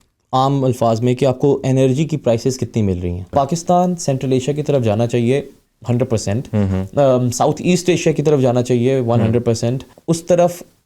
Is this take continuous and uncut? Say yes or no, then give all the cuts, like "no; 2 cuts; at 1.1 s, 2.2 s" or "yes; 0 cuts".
no; 2 cuts; at 3.3 s, 9.9 s